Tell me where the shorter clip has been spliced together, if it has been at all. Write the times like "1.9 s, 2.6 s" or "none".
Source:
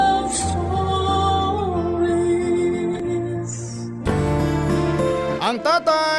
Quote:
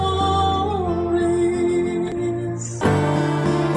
2.7 s